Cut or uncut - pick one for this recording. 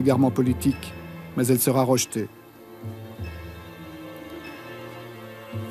cut